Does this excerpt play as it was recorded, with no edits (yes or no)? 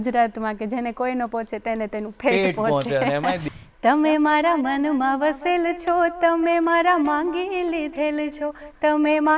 no